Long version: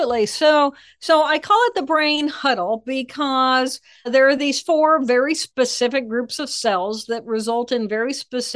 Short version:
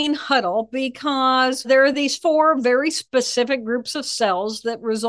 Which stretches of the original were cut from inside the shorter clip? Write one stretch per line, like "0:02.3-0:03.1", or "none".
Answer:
0:03.7-0:04.0